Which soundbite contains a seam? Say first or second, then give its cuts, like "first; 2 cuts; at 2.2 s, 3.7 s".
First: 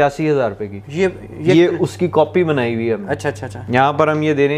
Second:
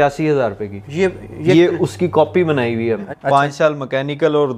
second; 1 cut; at 3.1 s